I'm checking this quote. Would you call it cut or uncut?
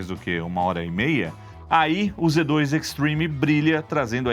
uncut